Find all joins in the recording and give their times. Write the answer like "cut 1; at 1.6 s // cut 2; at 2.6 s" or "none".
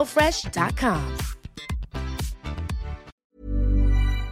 cut 1; at 3.1 s